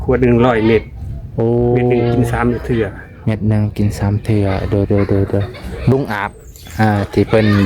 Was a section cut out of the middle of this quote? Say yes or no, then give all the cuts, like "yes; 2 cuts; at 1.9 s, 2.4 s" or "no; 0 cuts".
yes; 1 cut; at 5.9 s